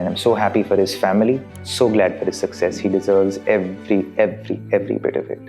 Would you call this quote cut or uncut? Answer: cut